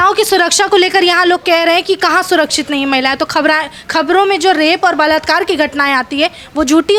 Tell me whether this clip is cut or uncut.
uncut